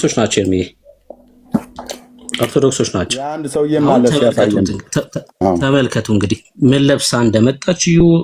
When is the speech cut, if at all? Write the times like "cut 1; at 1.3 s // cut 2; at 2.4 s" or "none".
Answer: cut 1; at 3.4 s